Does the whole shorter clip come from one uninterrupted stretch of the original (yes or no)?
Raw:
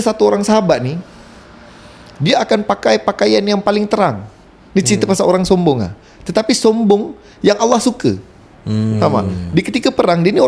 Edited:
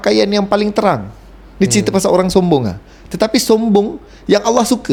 yes